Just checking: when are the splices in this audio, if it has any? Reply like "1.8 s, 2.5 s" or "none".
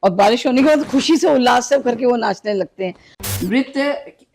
3.1 s